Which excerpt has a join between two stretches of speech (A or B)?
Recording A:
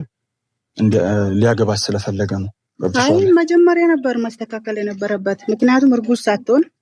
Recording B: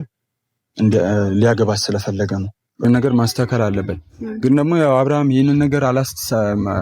B